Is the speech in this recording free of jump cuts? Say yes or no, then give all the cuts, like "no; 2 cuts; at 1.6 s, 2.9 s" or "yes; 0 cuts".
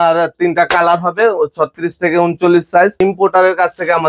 no; 1 cut; at 3.0 s